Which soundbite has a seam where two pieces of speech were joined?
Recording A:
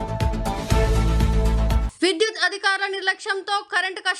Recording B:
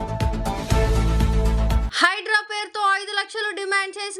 A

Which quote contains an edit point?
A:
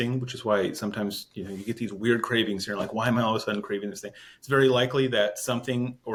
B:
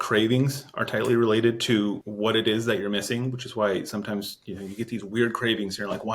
B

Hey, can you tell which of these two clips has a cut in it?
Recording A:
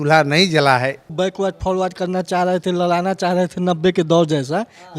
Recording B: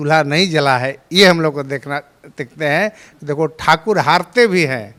A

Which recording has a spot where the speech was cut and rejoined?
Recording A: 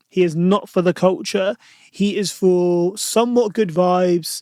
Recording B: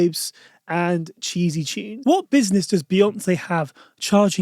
B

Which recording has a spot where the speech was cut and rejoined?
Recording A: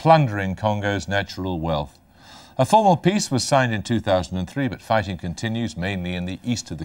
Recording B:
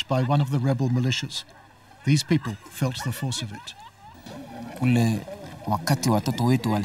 B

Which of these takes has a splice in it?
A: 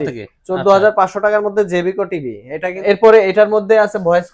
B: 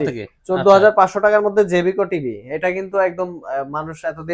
A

